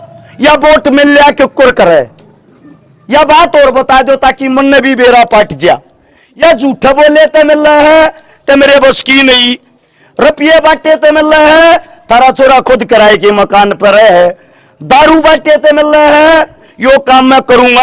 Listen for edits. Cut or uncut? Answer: uncut